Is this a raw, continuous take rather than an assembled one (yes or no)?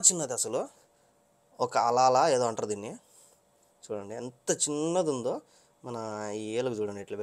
yes